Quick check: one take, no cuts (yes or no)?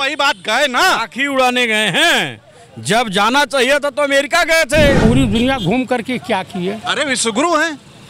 no